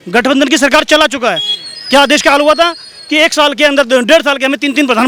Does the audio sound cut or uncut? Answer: uncut